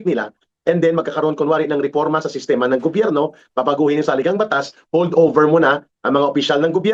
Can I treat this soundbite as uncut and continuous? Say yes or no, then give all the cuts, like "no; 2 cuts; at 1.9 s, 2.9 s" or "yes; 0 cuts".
yes; 0 cuts